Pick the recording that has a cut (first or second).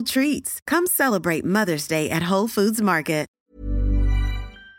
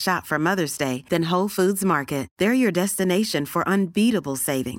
first